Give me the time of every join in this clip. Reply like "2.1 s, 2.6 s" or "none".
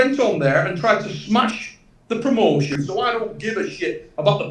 2.7 s